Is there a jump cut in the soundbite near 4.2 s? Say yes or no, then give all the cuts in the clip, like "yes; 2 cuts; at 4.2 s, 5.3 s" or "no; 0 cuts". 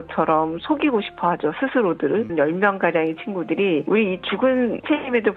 no; 1 cut; at 2.3 s